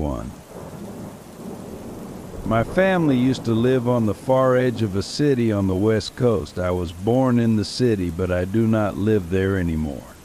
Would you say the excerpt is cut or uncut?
cut